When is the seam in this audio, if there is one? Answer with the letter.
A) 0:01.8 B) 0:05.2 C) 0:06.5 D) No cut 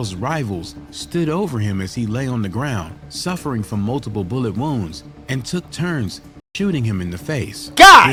D